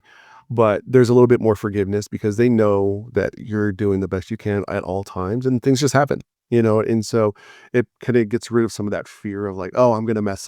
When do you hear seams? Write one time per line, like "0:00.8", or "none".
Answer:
none